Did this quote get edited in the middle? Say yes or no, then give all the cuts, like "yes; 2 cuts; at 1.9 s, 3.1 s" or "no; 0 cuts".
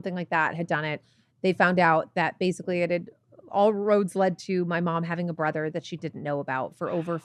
no; 0 cuts